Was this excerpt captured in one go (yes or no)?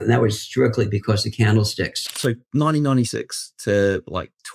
no